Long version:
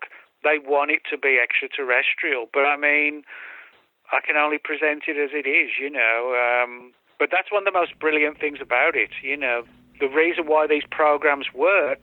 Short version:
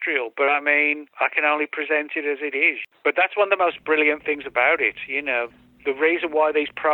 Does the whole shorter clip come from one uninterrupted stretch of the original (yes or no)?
no